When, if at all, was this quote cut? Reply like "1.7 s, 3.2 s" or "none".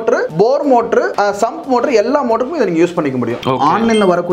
3.4 s